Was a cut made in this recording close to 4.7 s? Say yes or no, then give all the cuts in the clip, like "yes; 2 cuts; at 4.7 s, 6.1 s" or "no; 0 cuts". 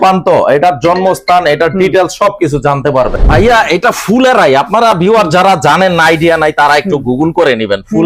no; 1 cut; at 3.1 s